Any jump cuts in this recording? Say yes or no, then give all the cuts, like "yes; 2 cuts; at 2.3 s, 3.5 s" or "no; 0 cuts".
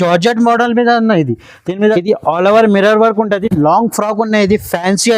yes; 1 cut; at 1.9 s